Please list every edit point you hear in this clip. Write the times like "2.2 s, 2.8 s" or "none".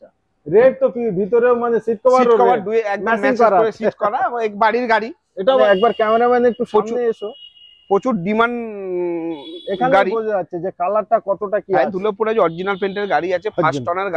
5.6 s